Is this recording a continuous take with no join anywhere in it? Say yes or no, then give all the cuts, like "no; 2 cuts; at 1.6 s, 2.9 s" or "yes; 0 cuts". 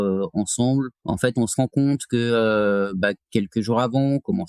yes; 0 cuts